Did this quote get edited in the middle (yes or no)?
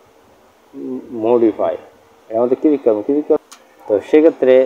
yes